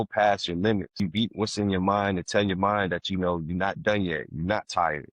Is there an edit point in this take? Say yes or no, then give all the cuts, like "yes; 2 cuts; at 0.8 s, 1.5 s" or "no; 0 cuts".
yes; 1 cut; at 1.0 s